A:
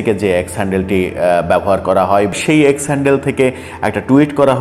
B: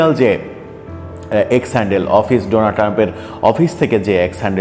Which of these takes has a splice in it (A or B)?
A